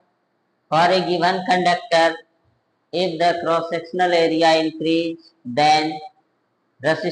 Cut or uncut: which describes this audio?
uncut